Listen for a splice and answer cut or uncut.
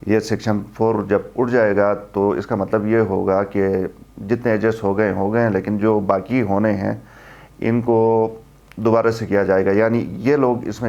uncut